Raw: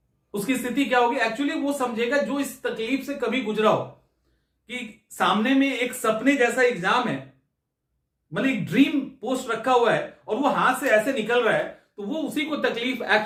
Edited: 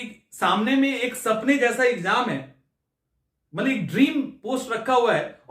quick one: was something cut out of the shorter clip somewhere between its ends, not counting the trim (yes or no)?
no